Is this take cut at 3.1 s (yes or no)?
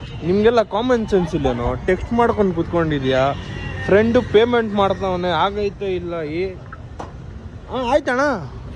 no